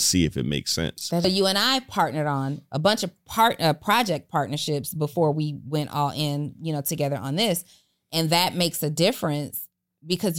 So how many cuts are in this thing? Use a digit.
1